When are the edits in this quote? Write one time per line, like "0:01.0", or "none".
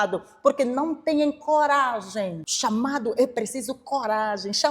0:02.4